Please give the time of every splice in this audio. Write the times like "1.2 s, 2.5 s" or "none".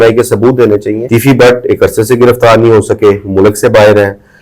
1.0 s